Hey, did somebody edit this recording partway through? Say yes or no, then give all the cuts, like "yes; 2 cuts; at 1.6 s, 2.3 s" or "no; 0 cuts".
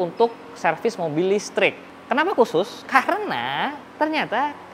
yes; 2 cuts; at 1.9 s, 3.8 s